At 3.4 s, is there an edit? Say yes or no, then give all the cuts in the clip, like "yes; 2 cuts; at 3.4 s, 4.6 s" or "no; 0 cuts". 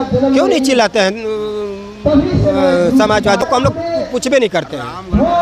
yes; 1 cut; at 3.4 s